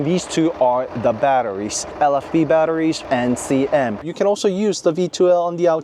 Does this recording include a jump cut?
yes; 3 cuts; at 1.9 s, 3.0 s, 4.0 s

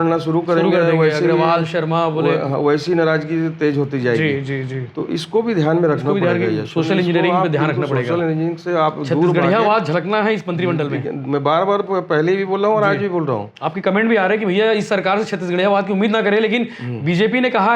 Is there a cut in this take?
no; 0 cuts

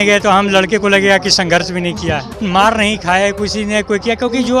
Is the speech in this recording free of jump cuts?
no; 1 cut; at 2.4 s

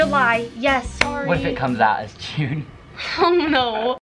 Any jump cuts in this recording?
no; 0 cuts

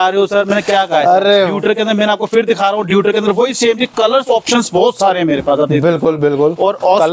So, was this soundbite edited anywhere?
yes; 1 cut; at 1.5 s

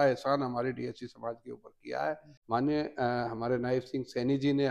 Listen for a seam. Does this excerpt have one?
yes; 1 cut; at 2.3 s

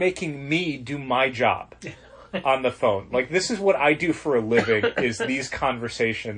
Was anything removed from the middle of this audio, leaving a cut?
no; 0 cuts

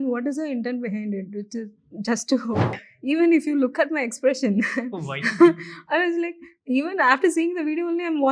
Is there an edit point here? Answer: yes; 1 cut; at 2.8 s

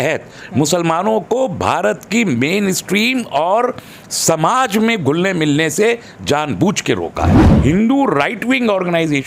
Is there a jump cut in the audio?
yes; 1 cut; at 7.4 s

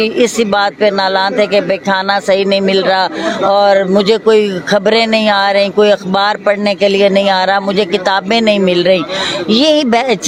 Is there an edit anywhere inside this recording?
no; 0 cuts

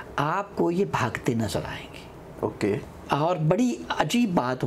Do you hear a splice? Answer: no; 0 cuts

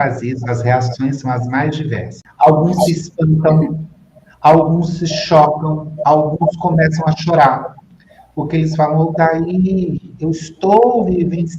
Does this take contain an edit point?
yes; 1 cut; at 2.2 s

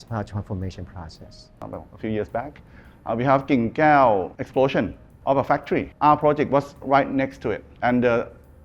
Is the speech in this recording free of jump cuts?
no; 4 cuts; at 1.5 s, 4.4 s, 5.9 s, 7.7 s

